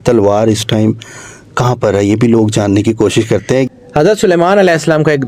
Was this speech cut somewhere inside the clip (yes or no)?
yes